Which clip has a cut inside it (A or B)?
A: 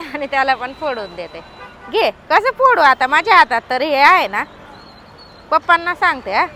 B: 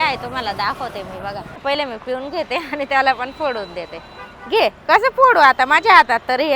B